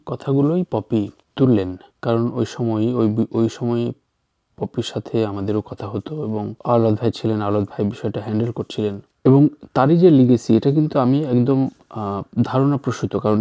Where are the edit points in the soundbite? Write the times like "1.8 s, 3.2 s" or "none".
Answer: none